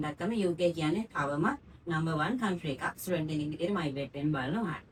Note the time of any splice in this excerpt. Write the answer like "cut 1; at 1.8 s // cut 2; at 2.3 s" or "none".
none